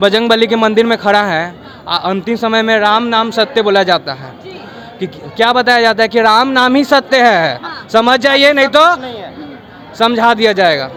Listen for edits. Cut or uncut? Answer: uncut